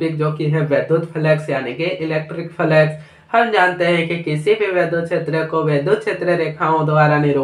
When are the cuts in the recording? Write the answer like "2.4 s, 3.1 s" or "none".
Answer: none